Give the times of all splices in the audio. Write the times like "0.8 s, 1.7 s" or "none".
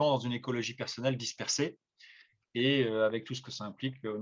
none